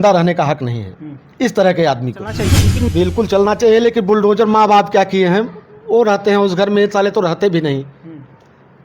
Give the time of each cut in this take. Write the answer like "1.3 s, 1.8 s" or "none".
2.7 s